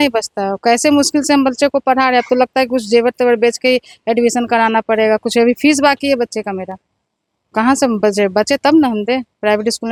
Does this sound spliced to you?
no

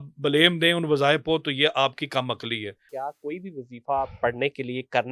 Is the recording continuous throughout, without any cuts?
no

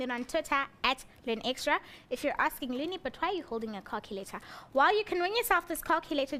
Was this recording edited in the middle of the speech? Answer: no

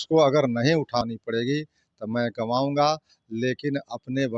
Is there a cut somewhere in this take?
yes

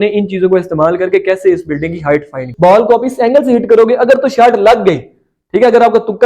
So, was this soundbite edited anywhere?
yes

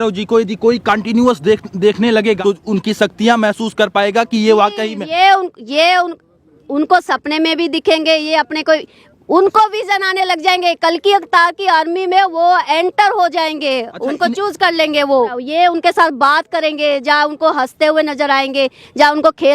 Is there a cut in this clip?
yes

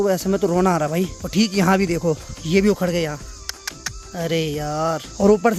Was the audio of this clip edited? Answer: no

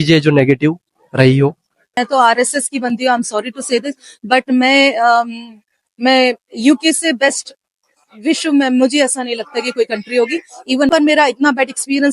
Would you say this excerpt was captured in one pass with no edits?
no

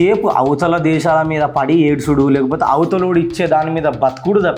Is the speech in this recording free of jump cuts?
yes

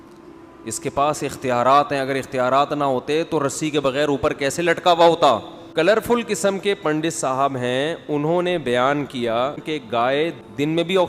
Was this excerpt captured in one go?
no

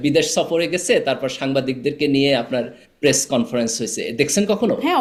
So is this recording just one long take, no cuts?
yes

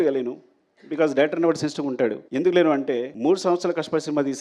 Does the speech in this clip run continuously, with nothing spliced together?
no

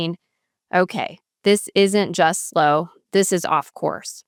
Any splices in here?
no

